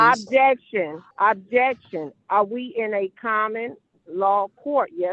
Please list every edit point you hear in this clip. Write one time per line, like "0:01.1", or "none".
0:01.0